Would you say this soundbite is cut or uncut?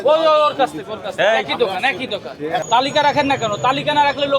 cut